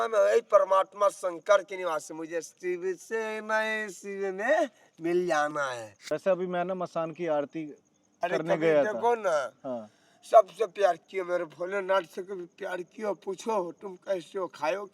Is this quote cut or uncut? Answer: cut